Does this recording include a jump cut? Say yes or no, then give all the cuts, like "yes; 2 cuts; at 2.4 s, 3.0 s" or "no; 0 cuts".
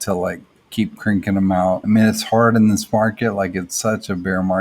yes; 1 cut; at 1.8 s